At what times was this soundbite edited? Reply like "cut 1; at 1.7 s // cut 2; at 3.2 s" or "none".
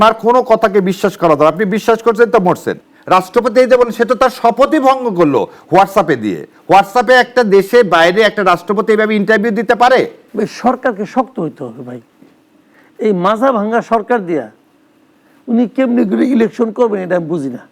cut 1; at 2.7 s // cut 2; at 10.2 s